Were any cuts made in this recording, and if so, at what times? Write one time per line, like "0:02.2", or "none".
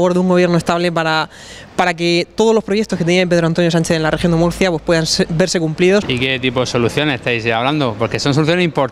0:06.1